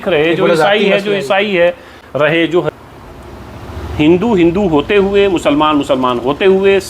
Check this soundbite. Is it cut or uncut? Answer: cut